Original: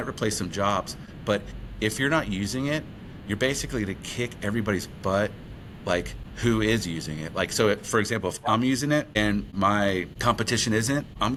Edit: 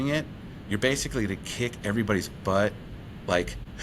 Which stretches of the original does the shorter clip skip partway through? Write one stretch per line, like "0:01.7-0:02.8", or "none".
none